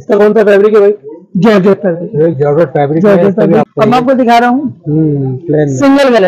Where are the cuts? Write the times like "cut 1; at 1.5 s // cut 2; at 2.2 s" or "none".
cut 1; at 3.6 s